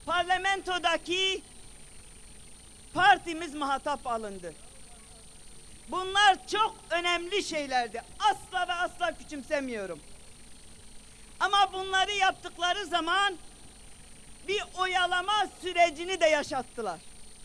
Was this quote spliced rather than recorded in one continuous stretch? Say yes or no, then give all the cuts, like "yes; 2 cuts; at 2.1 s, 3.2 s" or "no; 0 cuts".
no; 0 cuts